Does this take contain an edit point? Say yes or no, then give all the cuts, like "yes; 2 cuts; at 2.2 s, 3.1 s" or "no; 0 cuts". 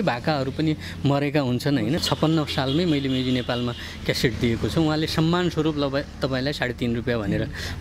yes; 1 cut; at 2.0 s